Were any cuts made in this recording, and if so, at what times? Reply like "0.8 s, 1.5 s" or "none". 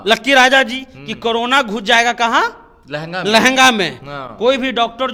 none